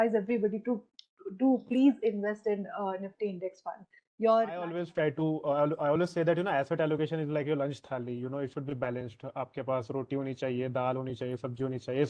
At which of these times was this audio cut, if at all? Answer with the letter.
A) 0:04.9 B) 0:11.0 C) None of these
A